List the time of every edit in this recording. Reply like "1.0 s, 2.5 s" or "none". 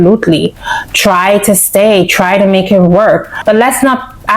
3.4 s

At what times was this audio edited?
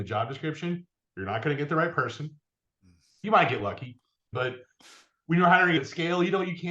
3.2 s, 4.3 s, 5.8 s

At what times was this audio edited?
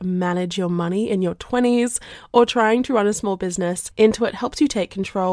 3.8 s

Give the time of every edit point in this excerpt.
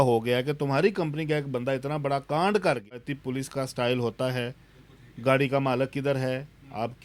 3.0 s

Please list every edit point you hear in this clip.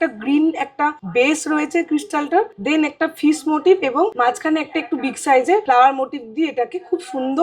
1.0 s, 2.6 s, 4.1 s, 5.6 s

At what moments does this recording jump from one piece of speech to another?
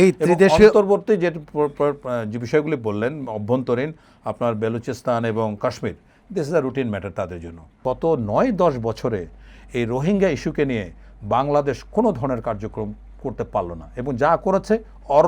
7.7 s

